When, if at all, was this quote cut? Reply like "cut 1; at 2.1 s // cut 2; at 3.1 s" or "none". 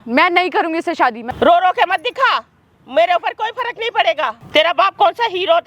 cut 1; at 1.2 s // cut 2; at 4.4 s